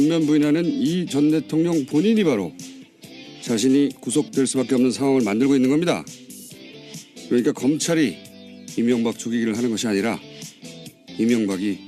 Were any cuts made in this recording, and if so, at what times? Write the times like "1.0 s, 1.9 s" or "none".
2.2 s